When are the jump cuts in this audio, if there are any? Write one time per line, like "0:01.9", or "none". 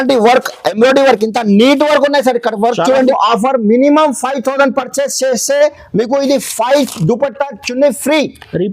0:03.1